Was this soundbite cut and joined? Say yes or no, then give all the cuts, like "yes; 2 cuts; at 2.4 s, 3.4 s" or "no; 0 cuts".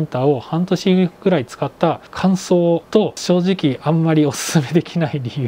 yes; 2 cuts; at 2.1 s, 3.2 s